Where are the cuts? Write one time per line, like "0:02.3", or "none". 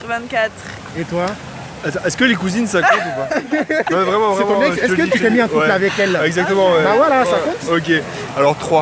none